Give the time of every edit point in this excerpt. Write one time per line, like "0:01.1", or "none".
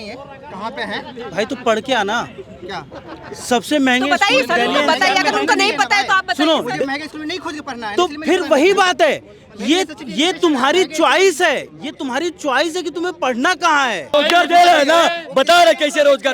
0:14.1